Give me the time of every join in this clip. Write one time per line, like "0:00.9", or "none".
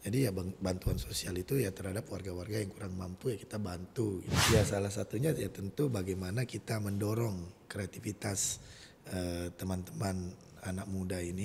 0:04.3